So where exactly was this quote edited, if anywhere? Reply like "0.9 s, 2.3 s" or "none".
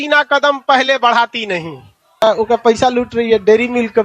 2.2 s